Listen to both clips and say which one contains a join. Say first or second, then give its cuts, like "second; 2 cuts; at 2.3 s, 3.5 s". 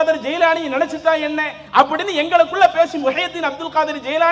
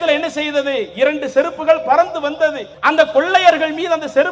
second; 1 cut; at 2.7 s